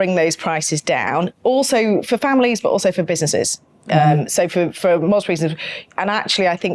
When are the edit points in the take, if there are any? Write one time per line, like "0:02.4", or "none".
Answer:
none